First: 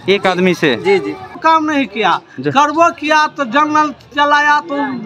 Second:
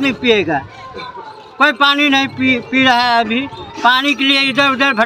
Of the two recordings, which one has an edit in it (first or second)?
first